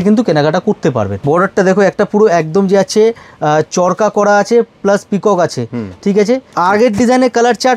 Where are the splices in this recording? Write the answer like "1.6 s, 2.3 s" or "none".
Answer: 1.1 s, 6.5 s